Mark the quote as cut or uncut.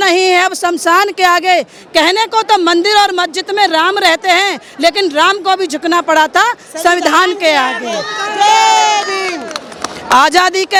uncut